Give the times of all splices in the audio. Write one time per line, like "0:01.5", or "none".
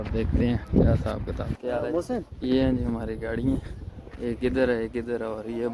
0:01.5
0:02.3